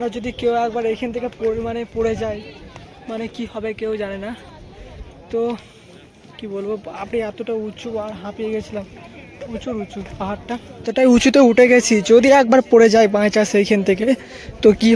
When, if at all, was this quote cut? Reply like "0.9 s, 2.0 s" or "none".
10.7 s